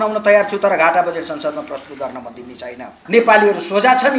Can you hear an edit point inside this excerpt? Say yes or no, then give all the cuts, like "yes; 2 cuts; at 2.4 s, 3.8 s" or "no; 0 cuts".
yes; 1 cut; at 3.0 s